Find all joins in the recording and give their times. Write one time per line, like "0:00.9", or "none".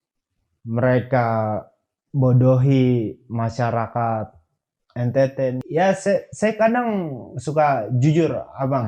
0:05.6